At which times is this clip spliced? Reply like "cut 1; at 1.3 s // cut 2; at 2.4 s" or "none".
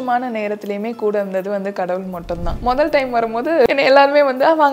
cut 1; at 2.5 s // cut 2; at 3.7 s